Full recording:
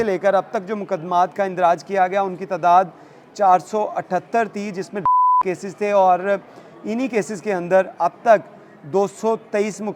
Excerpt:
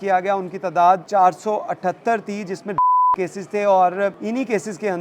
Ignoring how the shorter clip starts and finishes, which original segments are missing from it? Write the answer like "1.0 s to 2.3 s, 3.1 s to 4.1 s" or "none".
2.9 s to 3.3 s, 6.5 s to 6.8 s